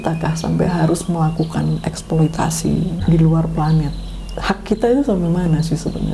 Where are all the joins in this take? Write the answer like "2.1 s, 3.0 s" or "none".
3.0 s